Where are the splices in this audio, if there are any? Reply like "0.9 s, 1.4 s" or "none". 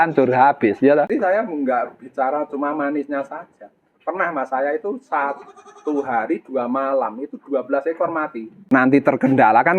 1.1 s, 8.5 s